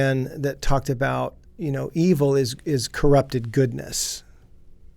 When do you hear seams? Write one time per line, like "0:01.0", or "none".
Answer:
0:01.4

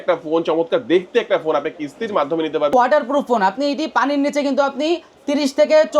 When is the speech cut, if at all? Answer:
0:02.7

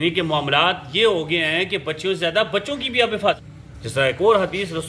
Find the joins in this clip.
0:03.4

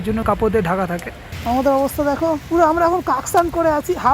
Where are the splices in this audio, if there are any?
0:01.2

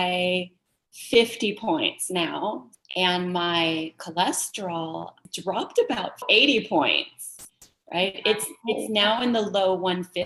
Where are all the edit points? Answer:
0:02.7
0:05.3
0:06.2

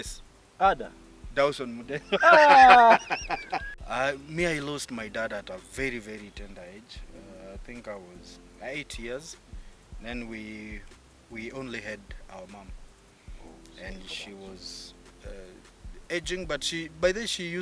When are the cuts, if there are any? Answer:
0:03.7

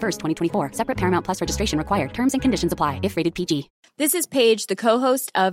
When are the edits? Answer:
0:03.8

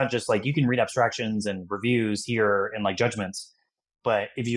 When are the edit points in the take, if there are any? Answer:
none

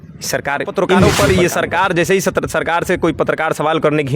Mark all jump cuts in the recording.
0:01.0

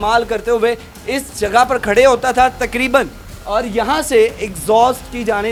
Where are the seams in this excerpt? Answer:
none

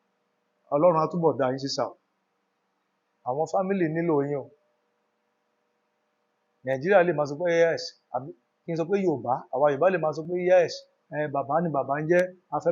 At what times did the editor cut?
none

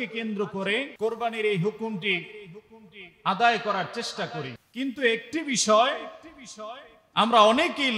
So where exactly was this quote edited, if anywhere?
0:00.9
0:04.6

